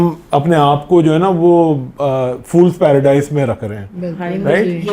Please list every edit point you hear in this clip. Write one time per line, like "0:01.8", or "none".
none